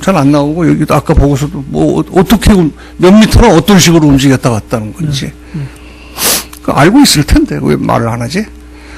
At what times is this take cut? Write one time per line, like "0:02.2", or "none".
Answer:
0:06.4